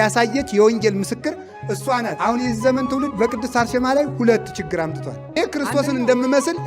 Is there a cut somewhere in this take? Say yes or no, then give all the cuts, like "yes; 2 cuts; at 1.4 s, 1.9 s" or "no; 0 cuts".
yes; 2 cuts; at 2.1 s, 5.4 s